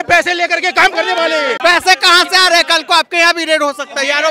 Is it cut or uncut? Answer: cut